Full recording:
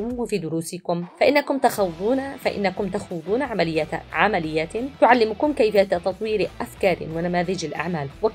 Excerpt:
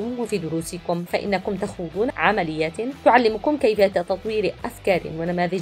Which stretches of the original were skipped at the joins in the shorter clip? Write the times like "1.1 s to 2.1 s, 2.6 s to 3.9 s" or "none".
1.0 s to 2.4 s, 3.5 s to 4.1 s